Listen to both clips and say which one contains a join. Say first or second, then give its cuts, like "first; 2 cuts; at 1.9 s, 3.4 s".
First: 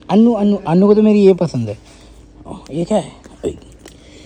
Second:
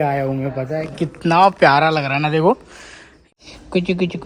second; 1 cut; at 3.2 s